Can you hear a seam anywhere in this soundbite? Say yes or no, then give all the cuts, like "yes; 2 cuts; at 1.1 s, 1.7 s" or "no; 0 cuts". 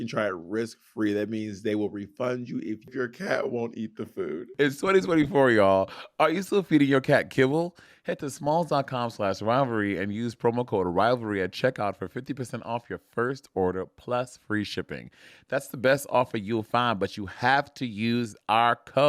yes; 1 cut; at 4.5 s